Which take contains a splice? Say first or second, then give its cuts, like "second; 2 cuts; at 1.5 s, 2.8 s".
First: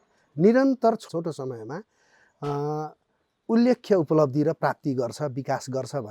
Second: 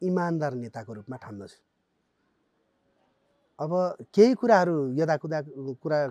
first; 1 cut; at 1.0 s